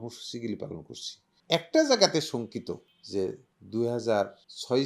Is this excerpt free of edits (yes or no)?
no